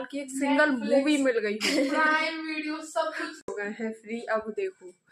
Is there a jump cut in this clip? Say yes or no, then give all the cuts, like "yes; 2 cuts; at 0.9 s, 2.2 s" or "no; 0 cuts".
yes; 1 cut; at 3.5 s